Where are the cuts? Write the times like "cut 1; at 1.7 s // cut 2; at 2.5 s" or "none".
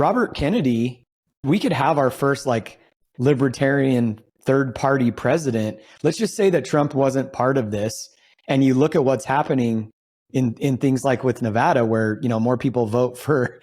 cut 1; at 1.4 s

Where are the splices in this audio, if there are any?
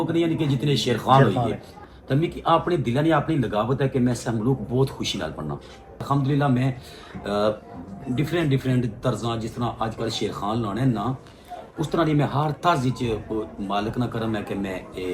cut 1; at 1.7 s // cut 2; at 6.0 s

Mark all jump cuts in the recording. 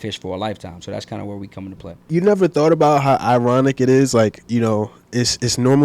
cut 1; at 2.1 s

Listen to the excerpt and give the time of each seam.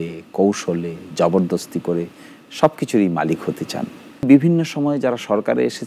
cut 1; at 4.3 s

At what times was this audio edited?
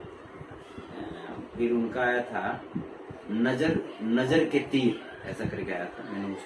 none

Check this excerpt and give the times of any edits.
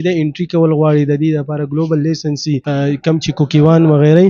cut 1; at 2.6 s

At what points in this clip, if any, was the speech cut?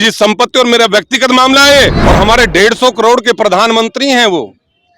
cut 1; at 2.0 s

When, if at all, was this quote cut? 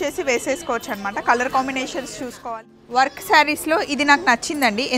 cut 1; at 2.4 s

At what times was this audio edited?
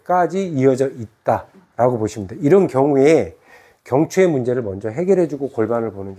none

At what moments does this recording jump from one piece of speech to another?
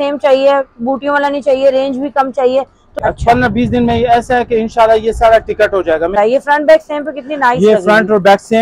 cut 1; at 3.0 s // cut 2; at 6.2 s

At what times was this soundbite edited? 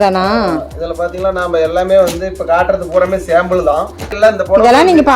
cut 1; at 4.0 s

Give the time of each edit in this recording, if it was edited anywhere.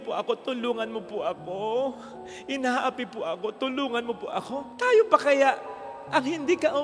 none

